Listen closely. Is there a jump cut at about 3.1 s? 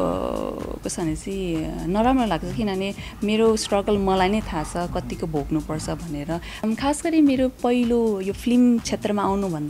no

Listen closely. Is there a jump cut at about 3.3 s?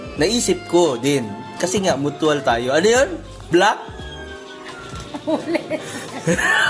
yes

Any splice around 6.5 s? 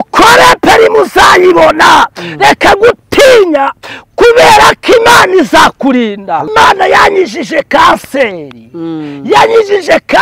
yes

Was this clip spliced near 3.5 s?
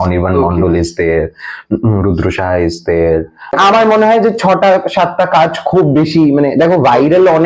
yes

